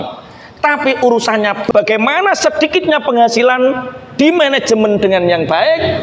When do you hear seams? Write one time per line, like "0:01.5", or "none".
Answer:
0:01.7